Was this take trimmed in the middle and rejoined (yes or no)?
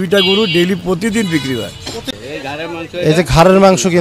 yes